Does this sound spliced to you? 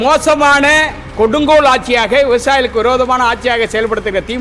no; 0 cuts

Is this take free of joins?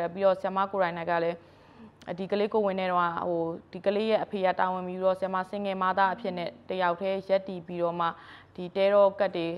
yes; 0 cuts

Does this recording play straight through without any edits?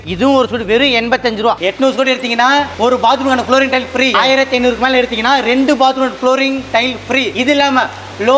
no; 2 cuts; at 1.6 s, 4.1 s

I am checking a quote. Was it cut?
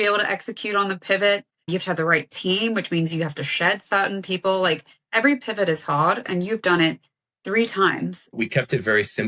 yes; 1 cut; at 8.3 s

